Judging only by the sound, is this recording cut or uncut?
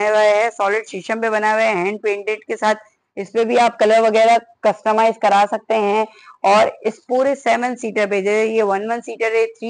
uncut